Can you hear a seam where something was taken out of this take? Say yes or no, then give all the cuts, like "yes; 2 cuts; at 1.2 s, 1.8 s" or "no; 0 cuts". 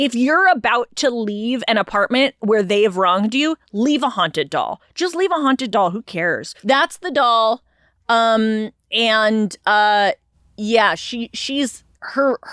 no; 0 cuts